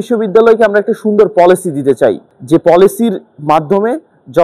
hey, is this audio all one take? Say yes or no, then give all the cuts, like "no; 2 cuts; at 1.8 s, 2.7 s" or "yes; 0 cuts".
no; 1 cut; at 2.3 s